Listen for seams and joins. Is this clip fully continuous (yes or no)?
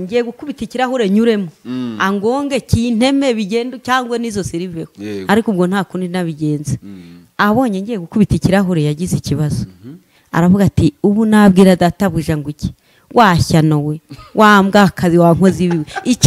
yes